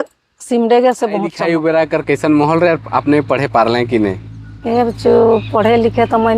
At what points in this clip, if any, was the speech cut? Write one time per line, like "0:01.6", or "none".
0:01.4